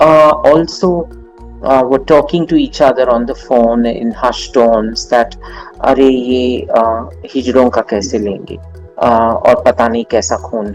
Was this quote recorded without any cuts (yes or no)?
yes